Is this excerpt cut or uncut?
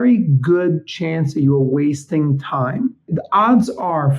cut